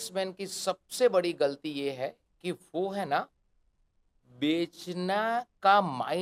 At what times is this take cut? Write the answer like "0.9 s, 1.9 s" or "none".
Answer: none